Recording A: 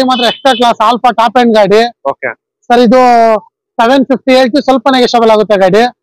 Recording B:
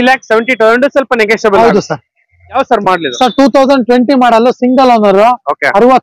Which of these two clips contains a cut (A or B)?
B